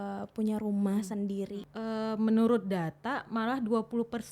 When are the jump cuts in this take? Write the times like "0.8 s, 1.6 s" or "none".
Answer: 1.6 s

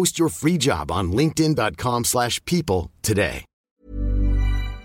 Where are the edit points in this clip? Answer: 3.7 s

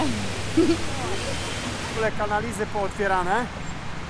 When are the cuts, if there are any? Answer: 2.0 s

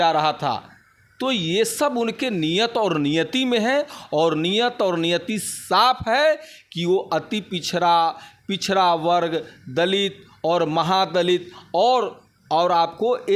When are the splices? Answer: none

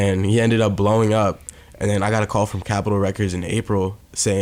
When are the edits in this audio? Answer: 2.6 s

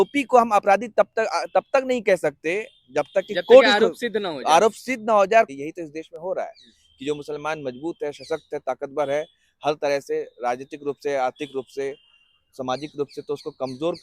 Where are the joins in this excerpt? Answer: 5.5 s

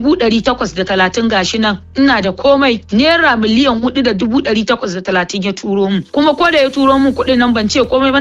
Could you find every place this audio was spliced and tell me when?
none

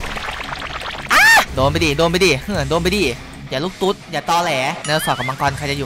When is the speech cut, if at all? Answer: 1.5 s, 4.8 s

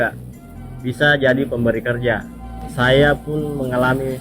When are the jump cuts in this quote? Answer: 2.6 s

